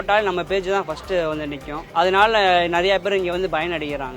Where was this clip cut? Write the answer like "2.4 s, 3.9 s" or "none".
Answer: 1.7 s